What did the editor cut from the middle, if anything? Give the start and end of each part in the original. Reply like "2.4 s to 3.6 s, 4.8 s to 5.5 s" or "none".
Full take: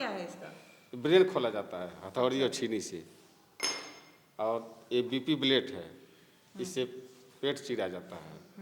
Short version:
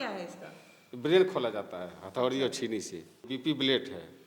3.3 s to 5.1 s